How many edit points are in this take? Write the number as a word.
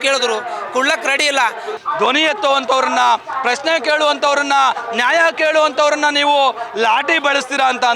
one